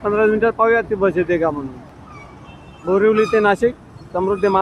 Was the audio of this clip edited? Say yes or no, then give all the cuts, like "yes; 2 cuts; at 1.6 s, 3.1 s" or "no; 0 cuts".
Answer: no; 0 cuts